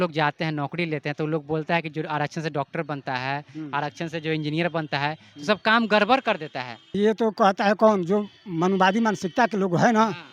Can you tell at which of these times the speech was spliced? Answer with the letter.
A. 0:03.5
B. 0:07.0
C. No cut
B